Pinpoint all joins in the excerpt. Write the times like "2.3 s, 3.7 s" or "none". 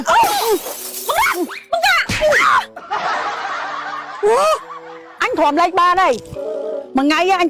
none